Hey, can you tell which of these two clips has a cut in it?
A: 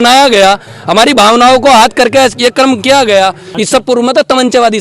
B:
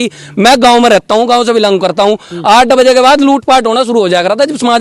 A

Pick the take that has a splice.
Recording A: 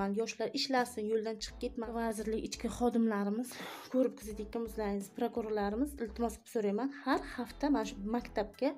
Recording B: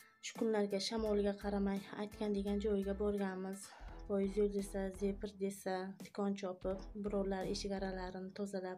A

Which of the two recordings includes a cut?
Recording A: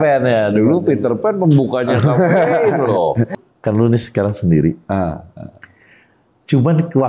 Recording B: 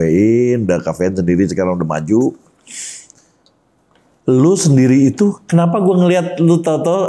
A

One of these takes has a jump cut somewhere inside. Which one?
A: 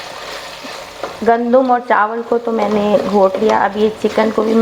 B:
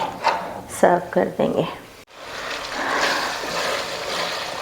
B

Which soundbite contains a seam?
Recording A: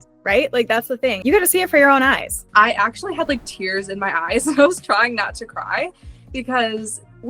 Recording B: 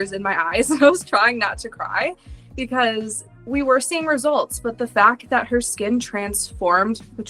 A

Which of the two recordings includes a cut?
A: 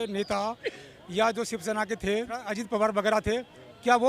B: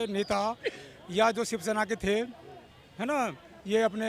A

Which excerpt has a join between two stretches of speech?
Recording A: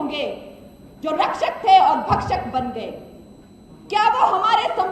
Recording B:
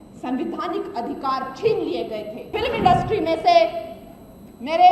B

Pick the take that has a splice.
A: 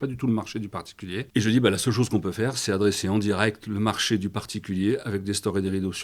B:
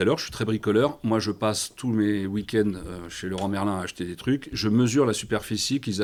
A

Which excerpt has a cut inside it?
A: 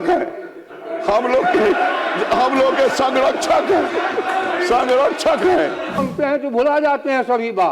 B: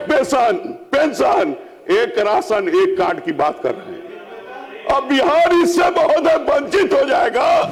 A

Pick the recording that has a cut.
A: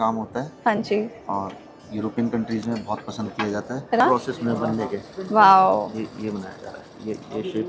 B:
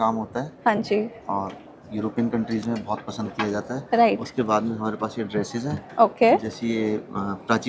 A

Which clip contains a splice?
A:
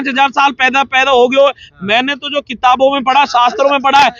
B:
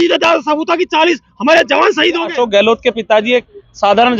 B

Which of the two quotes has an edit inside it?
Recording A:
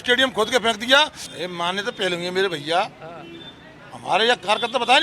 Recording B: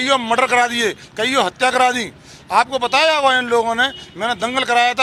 A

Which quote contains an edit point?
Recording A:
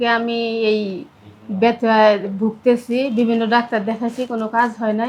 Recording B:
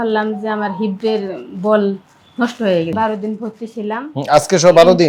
B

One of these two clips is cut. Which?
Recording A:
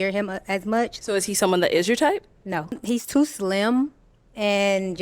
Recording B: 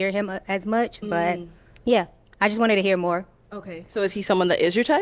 A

